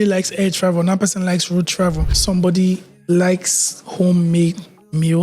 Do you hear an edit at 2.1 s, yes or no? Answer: yes